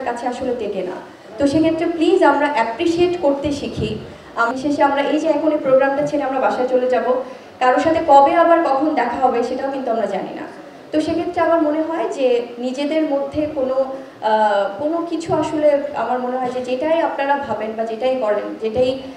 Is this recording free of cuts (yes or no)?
no